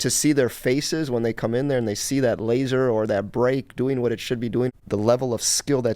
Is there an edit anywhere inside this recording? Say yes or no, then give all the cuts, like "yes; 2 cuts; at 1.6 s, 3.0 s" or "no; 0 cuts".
yes; 1 cut; at 4.7 s